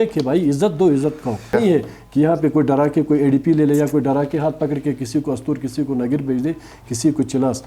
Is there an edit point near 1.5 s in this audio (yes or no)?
yes